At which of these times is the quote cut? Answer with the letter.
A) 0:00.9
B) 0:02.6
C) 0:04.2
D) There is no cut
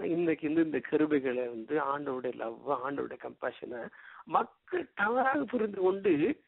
C